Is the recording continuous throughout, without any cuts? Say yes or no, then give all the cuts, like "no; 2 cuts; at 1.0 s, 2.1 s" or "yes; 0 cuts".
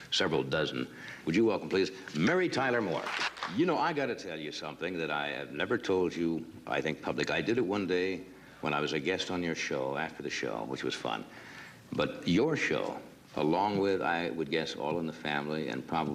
yes; 0 cuts